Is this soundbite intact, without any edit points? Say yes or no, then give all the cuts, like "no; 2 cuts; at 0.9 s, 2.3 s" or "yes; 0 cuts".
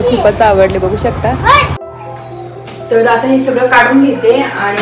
no; 1 cut; at 2.0 s